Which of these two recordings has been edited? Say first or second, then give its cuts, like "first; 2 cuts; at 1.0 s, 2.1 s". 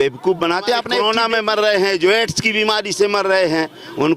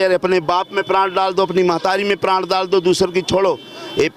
first; 1 cut; at 1.0 s